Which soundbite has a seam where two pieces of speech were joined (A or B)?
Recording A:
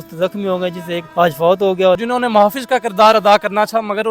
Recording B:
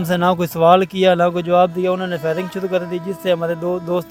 A